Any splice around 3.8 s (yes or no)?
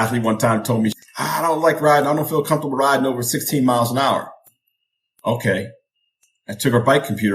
no